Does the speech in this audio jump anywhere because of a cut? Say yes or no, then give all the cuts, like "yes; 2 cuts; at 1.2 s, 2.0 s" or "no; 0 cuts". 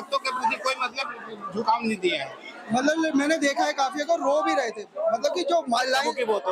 no; 0 cuts